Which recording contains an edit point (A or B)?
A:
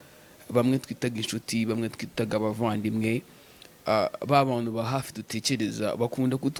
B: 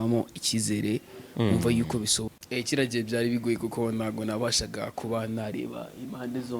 B